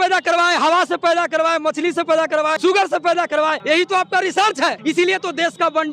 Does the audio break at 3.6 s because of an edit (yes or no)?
yes